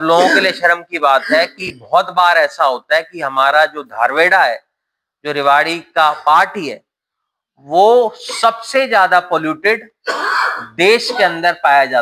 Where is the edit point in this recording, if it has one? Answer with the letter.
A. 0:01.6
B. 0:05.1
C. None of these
C